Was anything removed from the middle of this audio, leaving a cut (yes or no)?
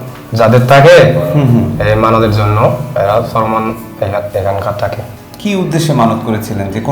yes